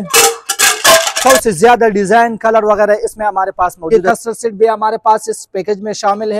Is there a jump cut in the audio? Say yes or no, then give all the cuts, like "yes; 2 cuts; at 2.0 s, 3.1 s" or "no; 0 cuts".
yes; 2 cuts; at 1.2 s, 3.9 s